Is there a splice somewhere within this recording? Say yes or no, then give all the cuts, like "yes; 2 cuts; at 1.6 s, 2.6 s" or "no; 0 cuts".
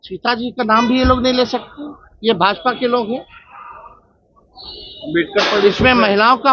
no; 0 cuts